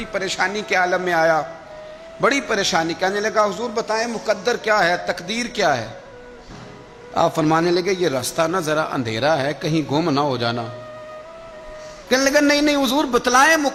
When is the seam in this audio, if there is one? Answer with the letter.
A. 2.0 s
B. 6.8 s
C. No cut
C